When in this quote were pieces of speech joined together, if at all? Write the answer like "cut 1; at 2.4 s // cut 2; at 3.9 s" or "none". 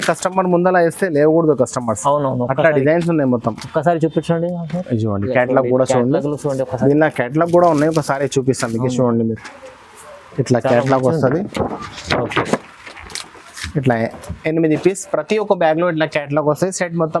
none